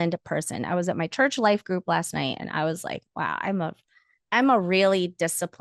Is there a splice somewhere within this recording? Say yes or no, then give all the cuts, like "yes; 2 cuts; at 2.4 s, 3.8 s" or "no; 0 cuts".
no; 0 cuts